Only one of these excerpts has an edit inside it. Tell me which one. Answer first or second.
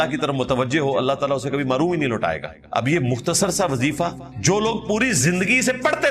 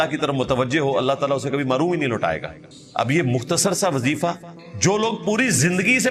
first